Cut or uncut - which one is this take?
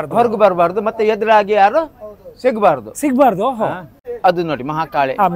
cut